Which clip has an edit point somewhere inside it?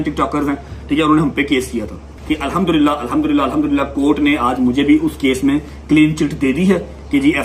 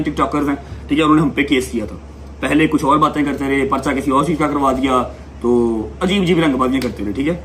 first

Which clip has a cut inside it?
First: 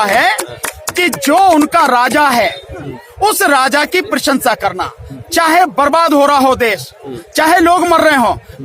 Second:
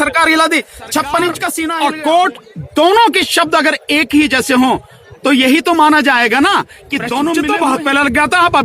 second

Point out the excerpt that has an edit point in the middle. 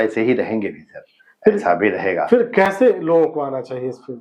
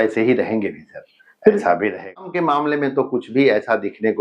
second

